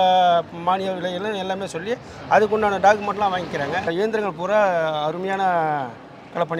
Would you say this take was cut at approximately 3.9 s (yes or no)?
yes